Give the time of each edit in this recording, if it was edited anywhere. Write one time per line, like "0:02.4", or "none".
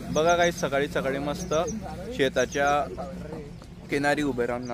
none